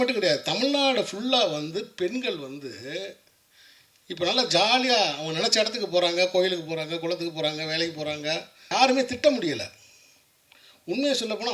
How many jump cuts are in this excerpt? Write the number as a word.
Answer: one